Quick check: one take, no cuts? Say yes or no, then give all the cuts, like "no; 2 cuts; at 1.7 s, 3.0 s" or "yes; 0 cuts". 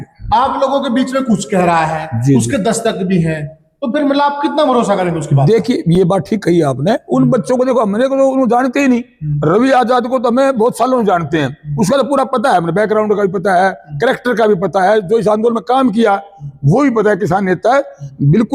yes; 0 cuts